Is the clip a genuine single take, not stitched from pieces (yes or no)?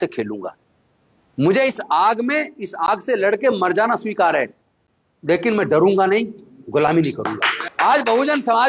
no